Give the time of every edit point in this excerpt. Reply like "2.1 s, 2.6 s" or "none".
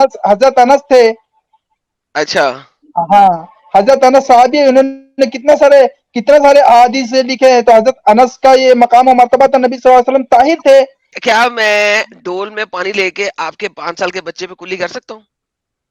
11.0 s